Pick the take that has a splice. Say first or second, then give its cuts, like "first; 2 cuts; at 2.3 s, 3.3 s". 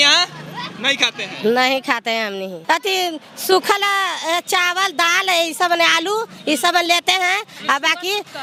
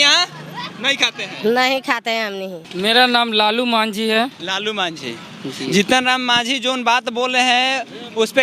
second; 1 cut; at 2.5 s